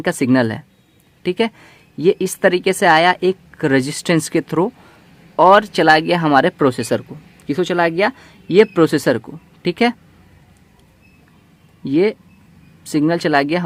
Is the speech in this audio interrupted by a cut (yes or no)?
no